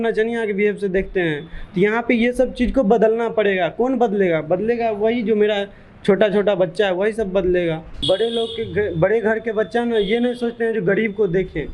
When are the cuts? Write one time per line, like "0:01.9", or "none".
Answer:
0:07.9